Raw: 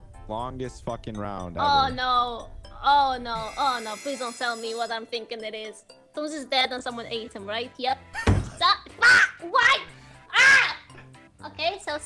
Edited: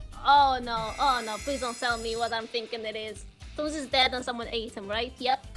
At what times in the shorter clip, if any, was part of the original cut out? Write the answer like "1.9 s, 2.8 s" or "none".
none